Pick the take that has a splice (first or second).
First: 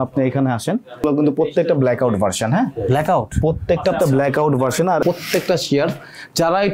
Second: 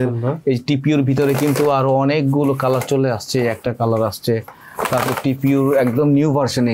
first